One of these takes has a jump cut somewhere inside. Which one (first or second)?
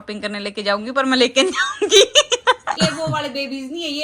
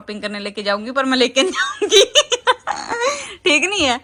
first